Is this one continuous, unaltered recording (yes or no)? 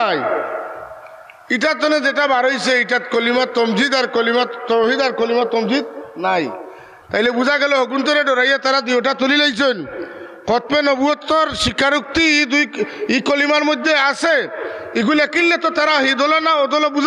yes